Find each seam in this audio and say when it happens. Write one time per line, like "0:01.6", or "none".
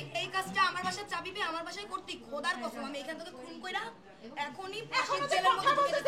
none